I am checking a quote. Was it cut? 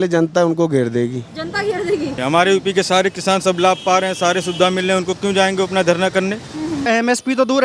yes; 2 cuts; at 2.2 s, 6.9 s

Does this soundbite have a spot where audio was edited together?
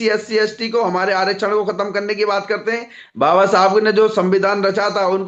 no; 0 cuts

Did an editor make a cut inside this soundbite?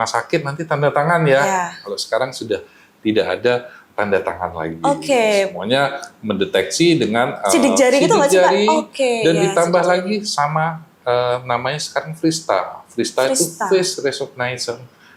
no; 0 cuts

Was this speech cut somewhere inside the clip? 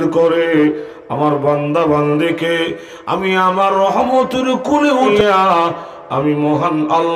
yes; 1 cut; at 5.1 s

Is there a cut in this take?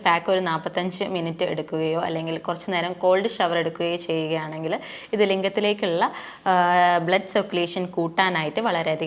no; 0 cuts

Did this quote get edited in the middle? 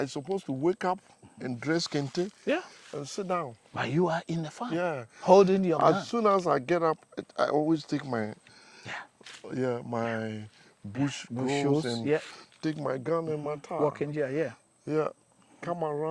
no; 0 cuts

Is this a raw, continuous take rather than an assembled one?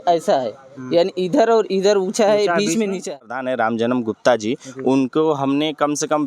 no; 1 cut; at 3.4 s

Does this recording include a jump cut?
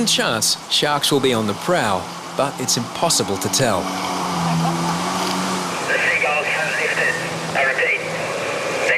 no; 0 cuts

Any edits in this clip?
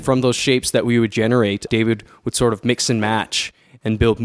no; 0 cuts

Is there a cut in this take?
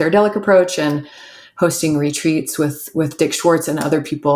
no; 0 cuts

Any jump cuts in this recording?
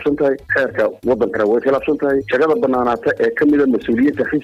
no; 0 cuts

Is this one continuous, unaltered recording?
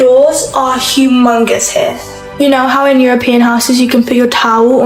yes; 0 cuts

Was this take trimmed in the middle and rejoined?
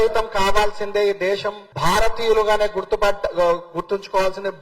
no; 0 cuts

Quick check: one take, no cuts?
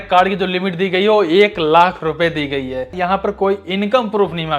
no; 1 cut; at 2.9 s

